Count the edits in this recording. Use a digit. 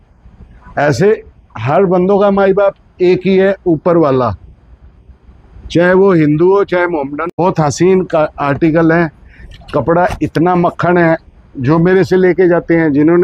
1